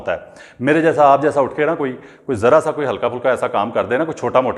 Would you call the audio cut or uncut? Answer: uncut